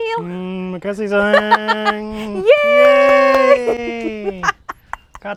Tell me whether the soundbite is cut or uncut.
uncut